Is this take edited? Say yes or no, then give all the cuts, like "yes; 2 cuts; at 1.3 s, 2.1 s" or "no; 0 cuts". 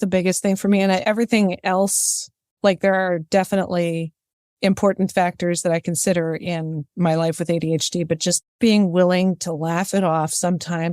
yes; 2 cuts; at 1.0 s, 8.5 s